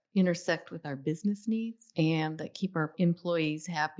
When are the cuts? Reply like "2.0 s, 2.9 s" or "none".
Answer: 1.8 s, 2.9 s